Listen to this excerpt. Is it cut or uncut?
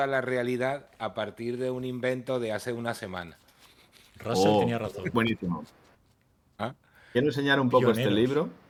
uncut